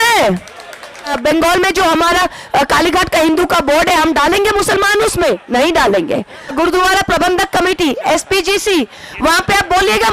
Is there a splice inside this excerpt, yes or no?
yes